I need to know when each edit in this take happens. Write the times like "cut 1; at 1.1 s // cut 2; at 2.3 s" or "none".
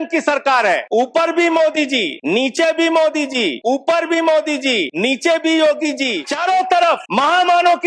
cut 1; at 0.8 s // cut 2; at 2.1 s // cut 3; at 3.6 s // cut 4; at 4.9 s // cut 5; at 6.2 s // cut 6; at 7.1 s